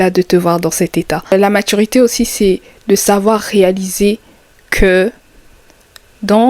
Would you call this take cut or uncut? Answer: cut